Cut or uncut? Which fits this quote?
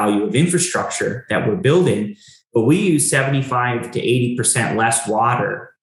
uncut